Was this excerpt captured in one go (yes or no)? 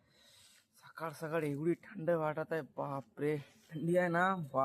no